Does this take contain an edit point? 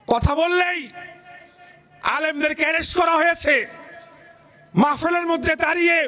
no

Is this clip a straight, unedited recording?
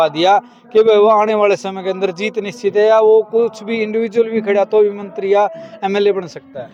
yes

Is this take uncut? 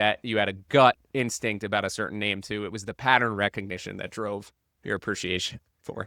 yes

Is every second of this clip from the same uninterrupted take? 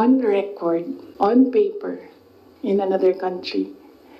no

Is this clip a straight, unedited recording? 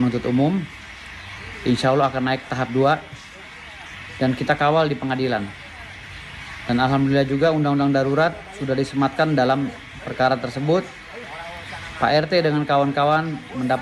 yes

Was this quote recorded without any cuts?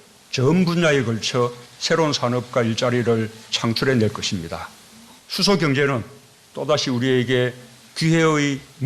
yes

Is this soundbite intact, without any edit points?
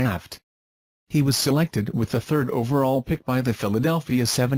yes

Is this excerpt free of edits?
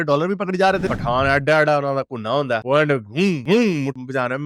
no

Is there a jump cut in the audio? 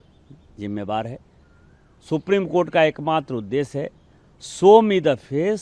no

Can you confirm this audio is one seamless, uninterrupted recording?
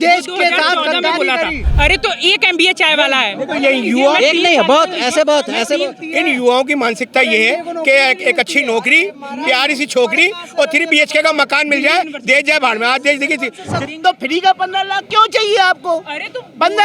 no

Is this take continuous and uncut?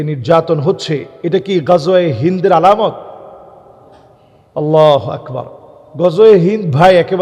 yes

